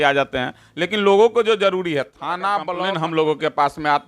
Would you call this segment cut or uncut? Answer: cut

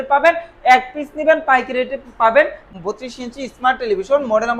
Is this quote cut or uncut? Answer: cut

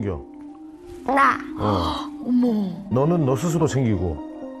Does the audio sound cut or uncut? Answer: cut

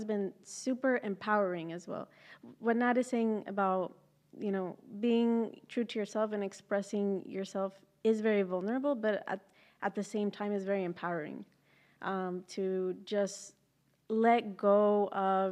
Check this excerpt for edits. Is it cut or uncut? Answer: uncut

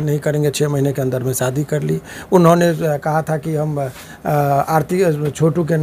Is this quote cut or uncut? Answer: uncut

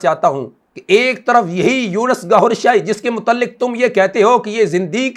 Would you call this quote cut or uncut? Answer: uncut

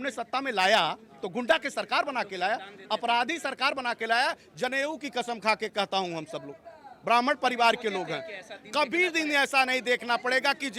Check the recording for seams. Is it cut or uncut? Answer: uncut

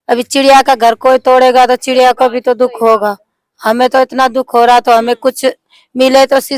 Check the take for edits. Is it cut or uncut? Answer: uncut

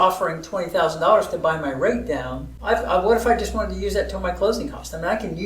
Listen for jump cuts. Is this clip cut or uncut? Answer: cut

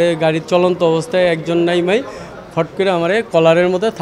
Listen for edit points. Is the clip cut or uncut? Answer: uncut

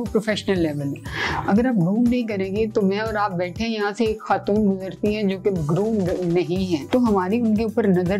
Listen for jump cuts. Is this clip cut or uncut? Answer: cut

